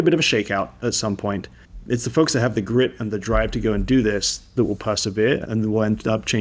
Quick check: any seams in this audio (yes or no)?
yes